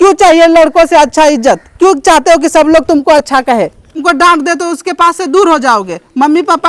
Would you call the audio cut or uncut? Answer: cut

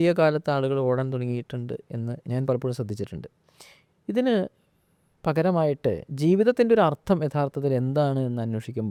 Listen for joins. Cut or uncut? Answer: uncut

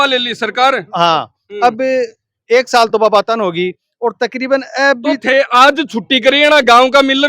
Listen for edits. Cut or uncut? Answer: uncut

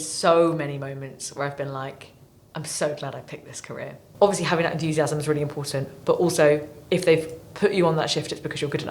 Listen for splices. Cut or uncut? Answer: cut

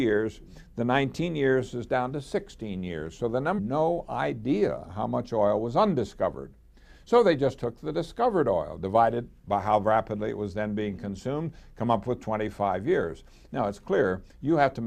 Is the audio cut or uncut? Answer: uncut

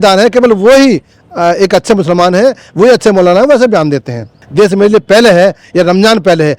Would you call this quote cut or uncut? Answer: cut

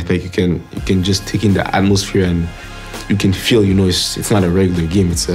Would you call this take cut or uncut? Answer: uncut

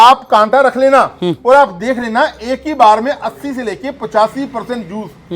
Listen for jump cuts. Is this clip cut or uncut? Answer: uncut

